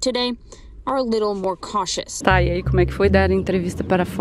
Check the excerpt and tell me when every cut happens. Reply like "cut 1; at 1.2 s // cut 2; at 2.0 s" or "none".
cut 1; at 2.1 s